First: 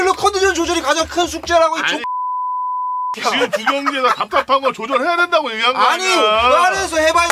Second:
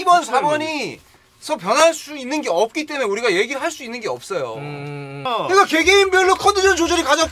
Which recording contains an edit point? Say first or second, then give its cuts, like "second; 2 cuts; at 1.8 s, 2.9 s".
second; 1 cut; at 5.2 s